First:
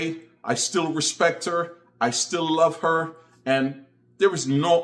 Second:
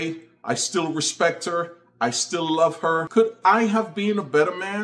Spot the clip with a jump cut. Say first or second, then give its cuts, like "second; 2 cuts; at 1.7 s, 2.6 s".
second; 1 cut; at 3.1 s